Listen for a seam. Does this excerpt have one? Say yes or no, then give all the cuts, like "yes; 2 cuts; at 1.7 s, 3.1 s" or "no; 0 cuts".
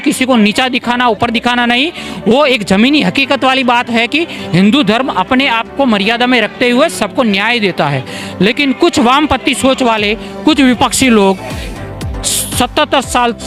no; 0 cuts